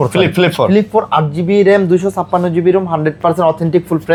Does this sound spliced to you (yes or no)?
no